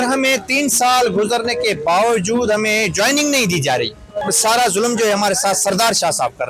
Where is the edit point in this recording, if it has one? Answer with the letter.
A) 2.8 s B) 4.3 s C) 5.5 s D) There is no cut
B